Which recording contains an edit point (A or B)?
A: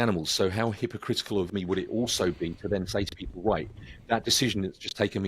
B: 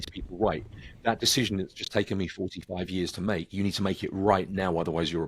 A